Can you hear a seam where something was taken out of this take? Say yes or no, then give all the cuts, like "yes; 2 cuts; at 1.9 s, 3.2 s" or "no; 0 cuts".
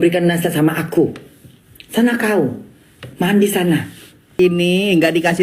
yes; 1 cut; at 4.4 s